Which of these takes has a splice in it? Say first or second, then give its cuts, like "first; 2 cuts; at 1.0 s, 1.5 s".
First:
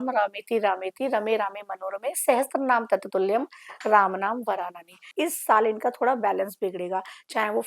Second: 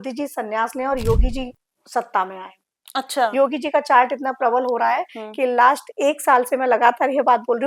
first; 1 cut; at 5.1 s